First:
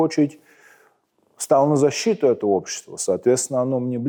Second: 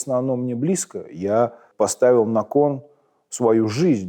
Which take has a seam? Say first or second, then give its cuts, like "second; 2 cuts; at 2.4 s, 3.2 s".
second; 1 cut; at 1.6 s